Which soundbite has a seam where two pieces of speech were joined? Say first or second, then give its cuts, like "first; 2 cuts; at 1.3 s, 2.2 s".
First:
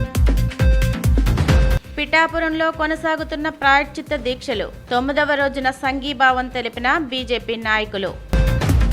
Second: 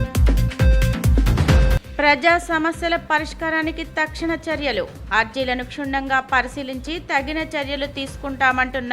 second; 1 cut; at 1.8 s